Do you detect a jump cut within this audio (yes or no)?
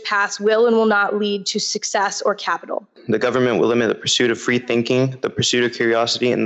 yes